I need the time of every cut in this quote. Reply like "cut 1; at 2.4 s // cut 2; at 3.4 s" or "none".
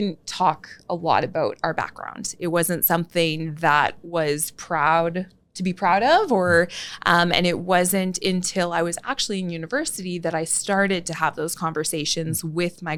none